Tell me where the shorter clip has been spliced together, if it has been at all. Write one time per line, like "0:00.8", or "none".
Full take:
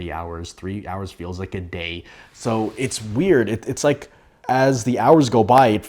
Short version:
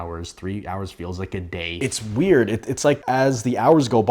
0:01.8
0:03.0